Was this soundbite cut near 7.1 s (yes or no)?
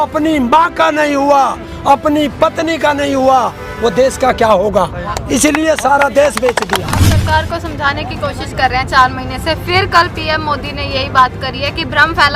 yes